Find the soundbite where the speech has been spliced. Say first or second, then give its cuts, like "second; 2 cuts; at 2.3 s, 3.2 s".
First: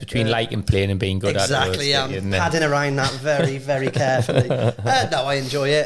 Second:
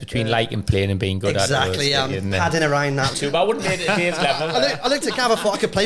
second; 1 cut; at 3.2 s